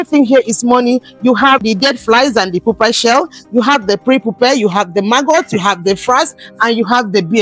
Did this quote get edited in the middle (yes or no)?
yes